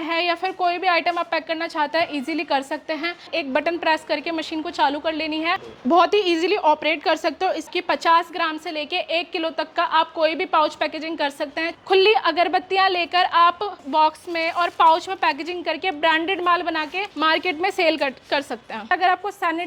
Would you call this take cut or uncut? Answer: cut